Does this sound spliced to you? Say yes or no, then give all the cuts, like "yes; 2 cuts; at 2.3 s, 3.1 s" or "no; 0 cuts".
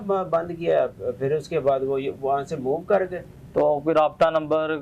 no; 0 cuts